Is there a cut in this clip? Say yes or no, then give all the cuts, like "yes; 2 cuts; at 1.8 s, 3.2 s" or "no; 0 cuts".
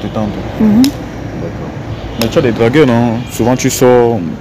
no; 0 cuts